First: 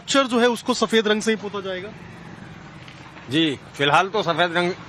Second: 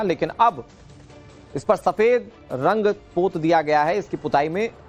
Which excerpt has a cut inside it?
second; 1 cut; at 3.0 s

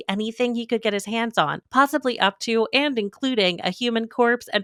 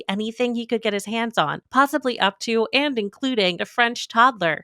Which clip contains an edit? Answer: second; 1 cut; at 3.6 s

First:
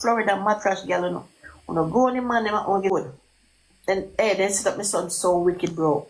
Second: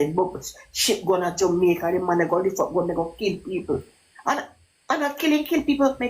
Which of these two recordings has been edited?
first; 1 cut; at 2.9 s

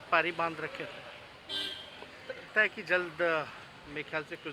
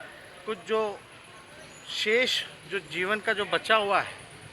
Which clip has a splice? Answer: first; 1 cut; at 2.5 s

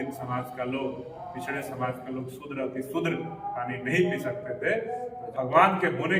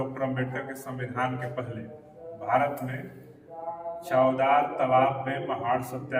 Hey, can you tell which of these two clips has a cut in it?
first; 1 cut; at 5.2 s

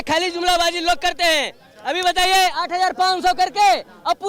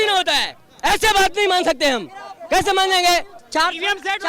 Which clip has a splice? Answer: second; 1 cut; at 3.4 s

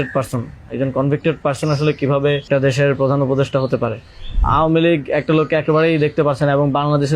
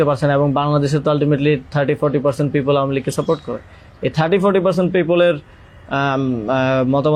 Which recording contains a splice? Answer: first; 2 cuts; at 2.5 s, 4.4 s

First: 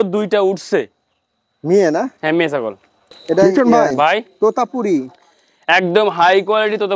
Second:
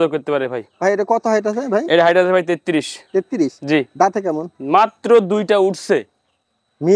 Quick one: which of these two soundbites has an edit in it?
first; 1 cut; at 3.4 s

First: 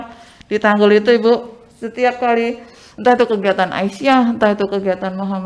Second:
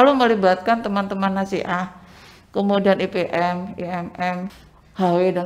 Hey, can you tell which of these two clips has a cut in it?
second; 1 cut; at 4.5 s

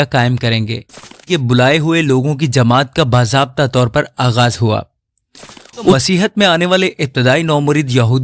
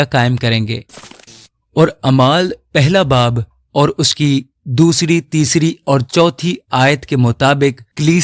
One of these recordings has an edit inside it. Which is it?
first; 2 cuts; at 1.2 s, 5.9 s

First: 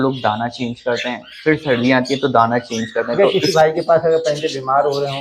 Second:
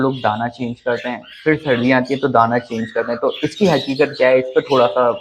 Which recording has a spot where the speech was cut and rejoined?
first; 1 cut; at 3.2 s

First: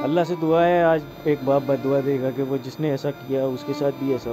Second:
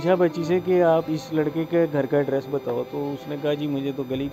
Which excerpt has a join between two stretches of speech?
second; 1 cut; at 1.1 s

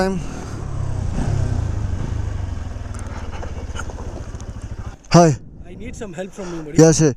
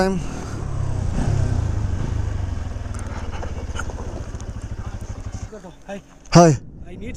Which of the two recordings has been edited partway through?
first; 1 cut; at 5.0 s

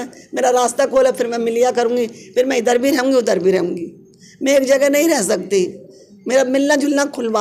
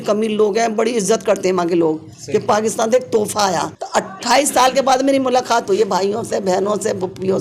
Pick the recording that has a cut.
second; 1 cut; at 3.8 s

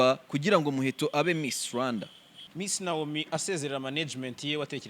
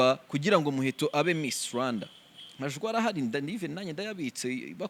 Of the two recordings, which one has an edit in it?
first; 1 cut; at 2.4 s

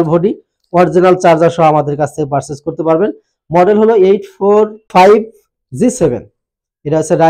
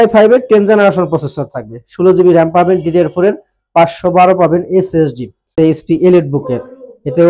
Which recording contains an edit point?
second; 1 cut; at 5.5 s

